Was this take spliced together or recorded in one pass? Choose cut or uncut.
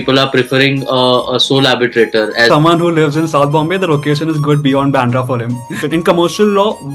cut